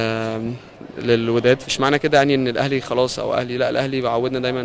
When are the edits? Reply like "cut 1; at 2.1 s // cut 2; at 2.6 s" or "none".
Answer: cut 1; at 1.6 s